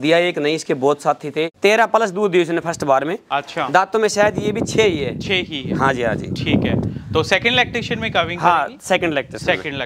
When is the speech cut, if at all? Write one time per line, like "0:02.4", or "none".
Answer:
0:01.5